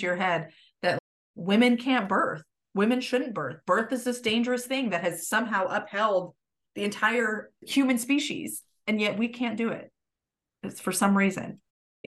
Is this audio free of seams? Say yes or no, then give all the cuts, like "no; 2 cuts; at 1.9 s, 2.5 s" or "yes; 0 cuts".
no; 1 cut; at 7.7 s